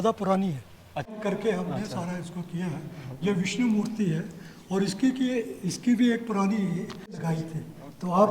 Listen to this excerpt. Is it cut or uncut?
cut